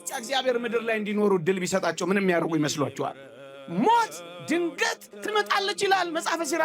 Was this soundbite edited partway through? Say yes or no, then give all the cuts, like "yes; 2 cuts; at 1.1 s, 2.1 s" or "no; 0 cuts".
yes; 1 cut; at 3.3 s